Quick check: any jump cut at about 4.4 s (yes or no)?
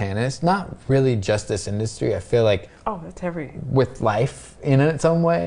no